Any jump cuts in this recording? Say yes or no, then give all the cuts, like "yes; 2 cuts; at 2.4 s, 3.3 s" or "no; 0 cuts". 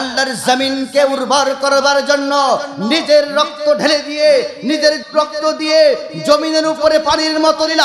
yes; 1 cut; at 5.0 s